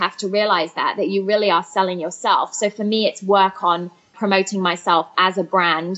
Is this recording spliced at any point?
yes; 1 cut; at 4.2 s

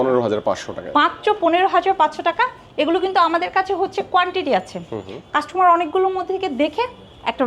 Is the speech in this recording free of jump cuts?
yes; 0 cuts

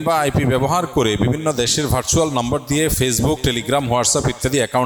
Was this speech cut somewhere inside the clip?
no; 0 cuts

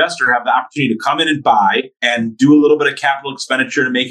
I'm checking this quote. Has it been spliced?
yes; 1 cut; at 2.0 s

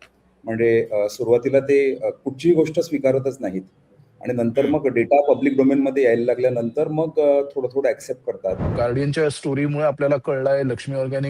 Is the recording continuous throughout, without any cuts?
no; 1 cut; at 8.6 s

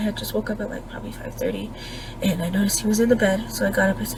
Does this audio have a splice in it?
no; 0 cuts

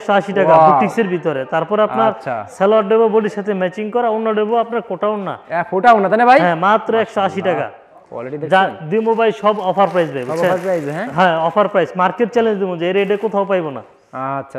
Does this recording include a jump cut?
no; 0 cuts

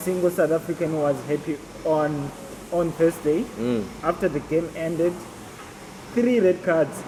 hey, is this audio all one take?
yes; 0 cuts

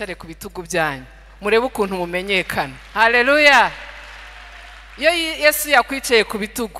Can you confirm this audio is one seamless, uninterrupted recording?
yes; 0 cuts

